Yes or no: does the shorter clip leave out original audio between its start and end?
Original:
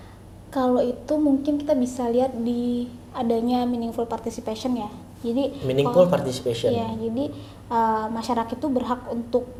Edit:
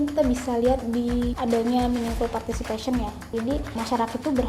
yes